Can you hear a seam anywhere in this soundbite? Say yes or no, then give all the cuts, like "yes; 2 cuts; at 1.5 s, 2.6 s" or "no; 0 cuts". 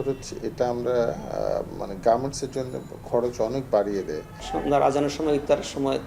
yes; 1 cut; at 4.4 s